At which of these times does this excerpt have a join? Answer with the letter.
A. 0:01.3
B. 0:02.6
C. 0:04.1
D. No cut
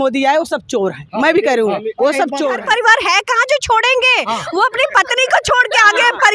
B